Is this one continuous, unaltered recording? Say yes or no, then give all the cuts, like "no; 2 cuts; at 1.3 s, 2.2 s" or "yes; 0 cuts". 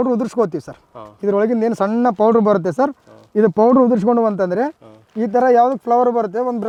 yes; 0 cuts